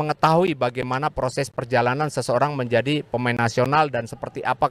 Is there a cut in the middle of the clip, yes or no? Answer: no